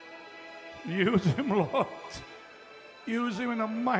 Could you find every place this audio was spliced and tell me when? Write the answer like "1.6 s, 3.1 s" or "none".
none